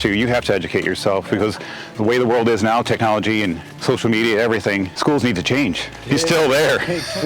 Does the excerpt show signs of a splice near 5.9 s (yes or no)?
yes